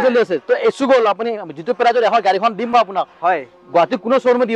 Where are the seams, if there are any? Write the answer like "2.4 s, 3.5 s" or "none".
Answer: none